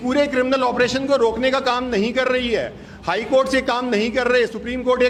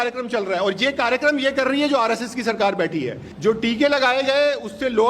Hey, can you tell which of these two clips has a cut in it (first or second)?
second